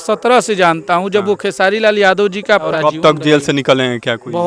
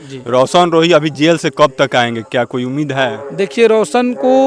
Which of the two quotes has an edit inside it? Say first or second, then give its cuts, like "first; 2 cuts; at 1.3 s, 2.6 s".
first; 1 cut; at 2.7 s